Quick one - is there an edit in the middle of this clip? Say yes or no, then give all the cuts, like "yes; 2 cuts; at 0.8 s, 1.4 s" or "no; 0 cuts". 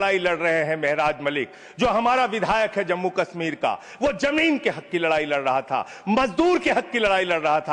no; 0 cuts